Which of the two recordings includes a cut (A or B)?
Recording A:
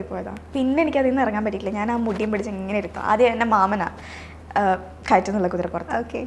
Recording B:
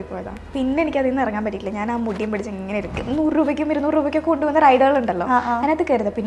B